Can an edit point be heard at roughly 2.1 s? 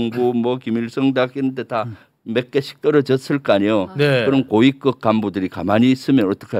no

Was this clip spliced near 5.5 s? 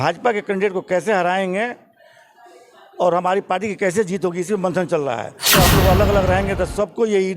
yes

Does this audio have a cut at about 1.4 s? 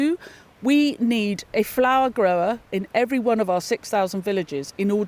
no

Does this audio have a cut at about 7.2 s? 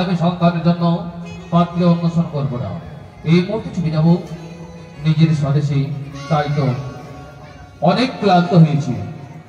no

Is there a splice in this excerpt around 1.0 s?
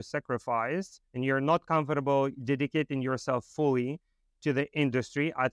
yes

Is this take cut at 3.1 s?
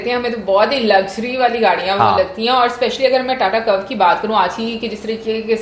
no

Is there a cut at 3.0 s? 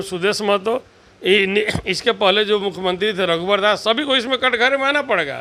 no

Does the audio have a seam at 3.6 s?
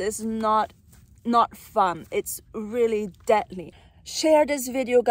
yes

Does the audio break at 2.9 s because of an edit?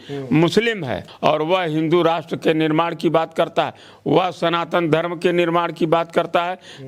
no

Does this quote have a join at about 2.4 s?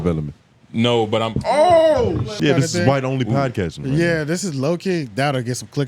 yes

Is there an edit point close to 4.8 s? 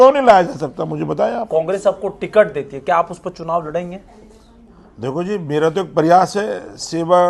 no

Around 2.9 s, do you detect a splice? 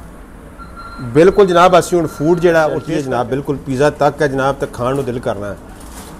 yes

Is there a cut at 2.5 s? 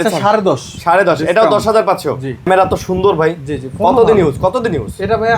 yes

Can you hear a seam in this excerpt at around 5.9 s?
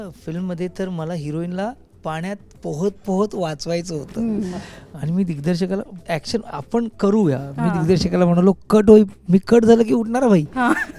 no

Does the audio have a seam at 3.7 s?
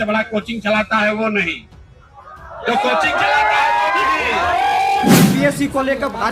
no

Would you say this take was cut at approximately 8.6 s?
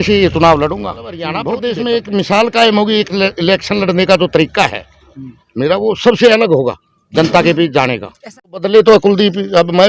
yes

